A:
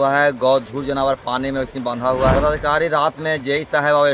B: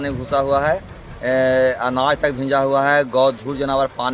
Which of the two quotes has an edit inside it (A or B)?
A